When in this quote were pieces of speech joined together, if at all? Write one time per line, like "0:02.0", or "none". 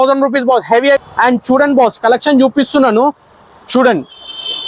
0:01.1